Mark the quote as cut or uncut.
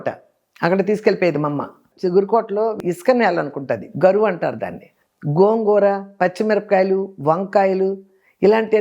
cut